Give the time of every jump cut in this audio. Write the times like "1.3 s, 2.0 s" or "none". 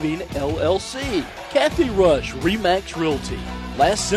1.4 s